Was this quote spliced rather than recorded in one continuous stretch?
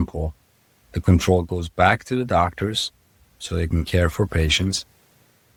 no; 0 cuts

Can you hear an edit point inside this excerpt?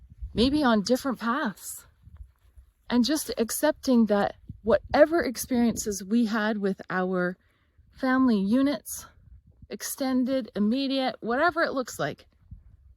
no; 0 cuts

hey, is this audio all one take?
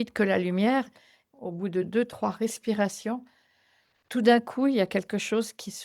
no; 1 cut; at 1.1 s

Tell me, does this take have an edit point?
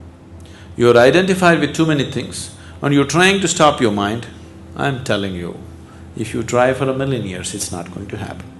no; 0 cuts

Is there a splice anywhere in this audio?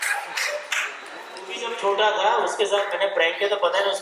yes; 1 cut; at 1.6 s

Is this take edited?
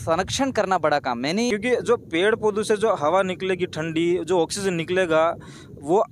yes; 1 cut; at 1.5 s

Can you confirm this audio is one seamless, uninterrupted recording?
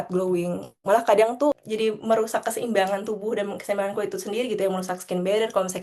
yes; 0 cuts

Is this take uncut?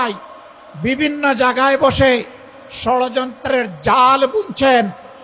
yes; 0 cuts

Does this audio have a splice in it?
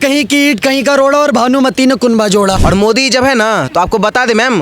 yes; 1 cut; at 2.6 s

